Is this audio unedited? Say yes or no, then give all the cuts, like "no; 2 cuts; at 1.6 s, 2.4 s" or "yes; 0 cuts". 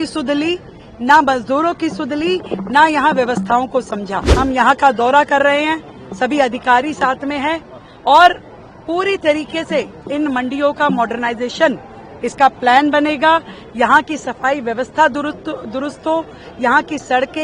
no; 1 cut; at 4.2 s